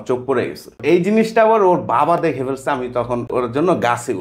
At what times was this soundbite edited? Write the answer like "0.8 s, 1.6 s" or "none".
0.8 s, 3.3 s